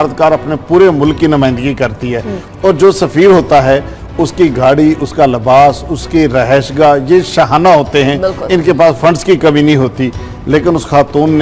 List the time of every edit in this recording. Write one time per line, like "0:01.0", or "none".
none